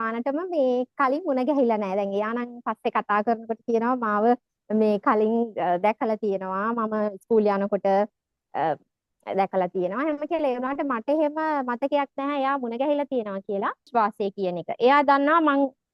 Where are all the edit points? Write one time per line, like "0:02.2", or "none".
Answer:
0:13.9